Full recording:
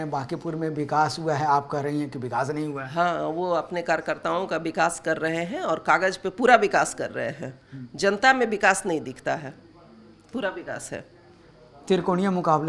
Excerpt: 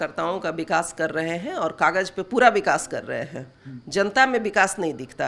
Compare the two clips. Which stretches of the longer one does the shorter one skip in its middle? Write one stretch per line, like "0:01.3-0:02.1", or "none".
none